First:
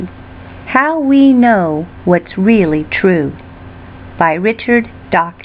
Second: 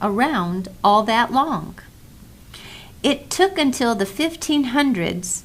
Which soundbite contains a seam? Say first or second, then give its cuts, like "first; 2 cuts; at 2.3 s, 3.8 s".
second; 1 cut; at 3.1 s